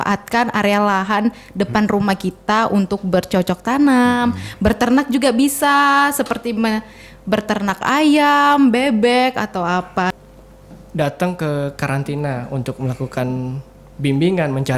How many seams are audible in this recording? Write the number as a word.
one